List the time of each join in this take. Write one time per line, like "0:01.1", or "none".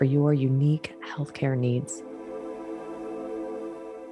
0:01.9